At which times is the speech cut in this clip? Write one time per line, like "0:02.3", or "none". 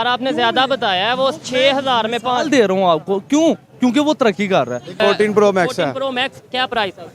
0:05.0